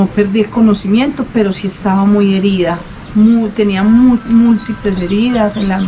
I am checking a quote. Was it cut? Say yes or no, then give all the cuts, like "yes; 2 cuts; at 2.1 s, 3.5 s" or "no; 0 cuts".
no; 0 cuts